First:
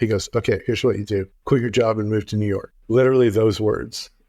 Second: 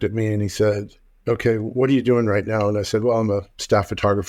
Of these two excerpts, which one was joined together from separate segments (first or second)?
first